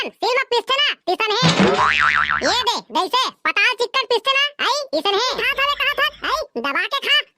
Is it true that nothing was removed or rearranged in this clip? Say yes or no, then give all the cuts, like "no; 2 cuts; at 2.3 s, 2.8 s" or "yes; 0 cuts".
no; 1 cut; at 5.4 s